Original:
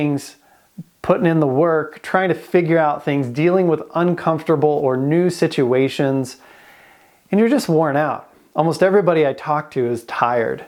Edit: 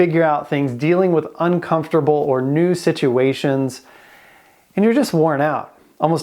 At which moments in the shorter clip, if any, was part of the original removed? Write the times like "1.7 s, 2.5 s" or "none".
none